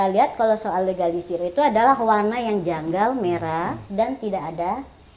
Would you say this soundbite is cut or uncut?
uncut